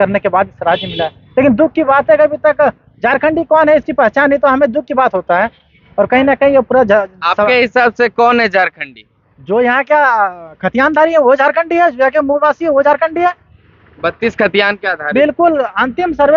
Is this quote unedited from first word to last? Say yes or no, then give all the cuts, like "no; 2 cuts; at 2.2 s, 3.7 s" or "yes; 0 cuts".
yes; 0 cuts